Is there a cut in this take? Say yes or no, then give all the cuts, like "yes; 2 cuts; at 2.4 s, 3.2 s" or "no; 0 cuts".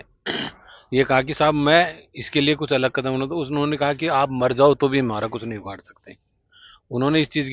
no; 0 cuts